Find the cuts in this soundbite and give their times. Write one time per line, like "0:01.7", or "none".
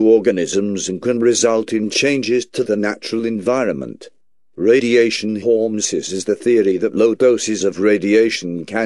0:05.9

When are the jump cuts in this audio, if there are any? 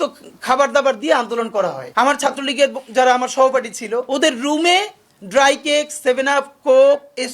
0:01.8
0:04.1

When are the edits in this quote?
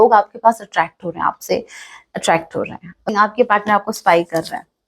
0:03.1

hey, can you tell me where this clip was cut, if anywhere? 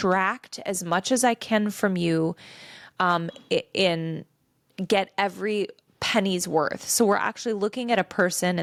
none

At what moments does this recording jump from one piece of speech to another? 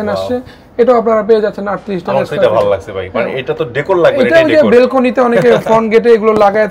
none

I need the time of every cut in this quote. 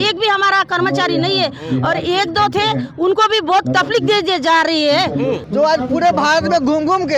0:05.4

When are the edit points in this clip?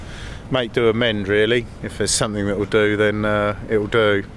none

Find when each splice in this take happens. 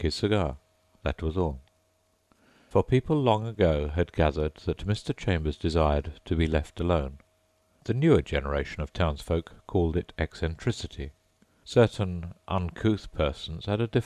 0:03.2

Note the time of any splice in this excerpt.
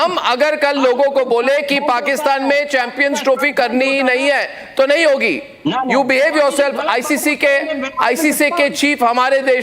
none

